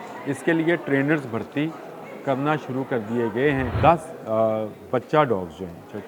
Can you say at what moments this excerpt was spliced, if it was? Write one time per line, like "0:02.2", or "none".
0:03.7

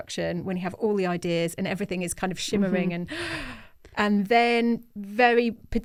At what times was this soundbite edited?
none

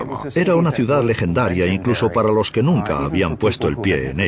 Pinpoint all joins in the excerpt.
none

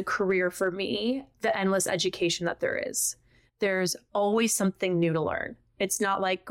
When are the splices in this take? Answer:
0:01.3

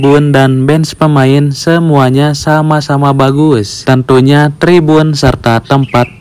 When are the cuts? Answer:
none

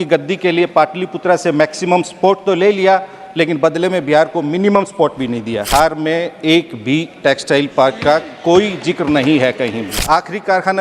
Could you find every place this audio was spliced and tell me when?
0:05.7
0:10.0

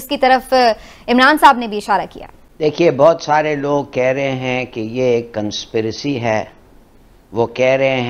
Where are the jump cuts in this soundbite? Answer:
none

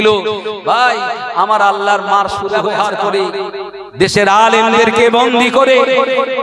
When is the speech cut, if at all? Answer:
0:02.6

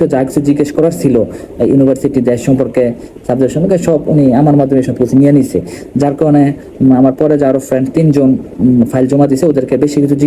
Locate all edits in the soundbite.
none

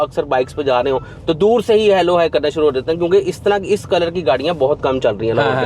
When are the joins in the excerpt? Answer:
none

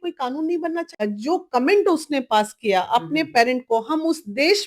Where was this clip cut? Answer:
0:01.0

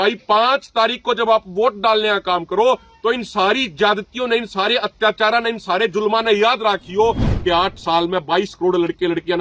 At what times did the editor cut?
0:07.3

